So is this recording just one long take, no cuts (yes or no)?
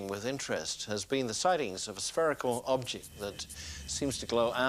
yes